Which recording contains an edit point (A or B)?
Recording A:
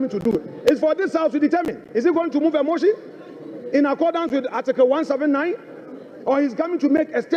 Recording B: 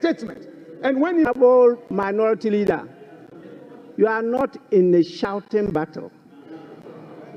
B